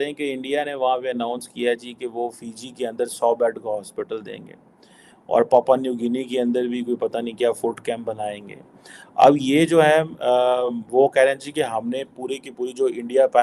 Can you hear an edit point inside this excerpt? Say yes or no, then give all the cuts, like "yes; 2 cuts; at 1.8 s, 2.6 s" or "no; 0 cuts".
no; 0 cuts